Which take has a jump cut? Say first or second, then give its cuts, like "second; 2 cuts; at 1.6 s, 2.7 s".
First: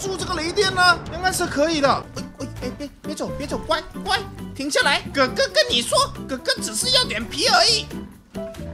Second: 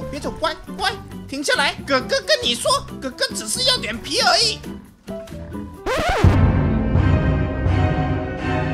first; 1 cut; at 2.1 s